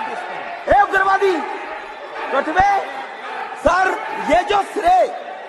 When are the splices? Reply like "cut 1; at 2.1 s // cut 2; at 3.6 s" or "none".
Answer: none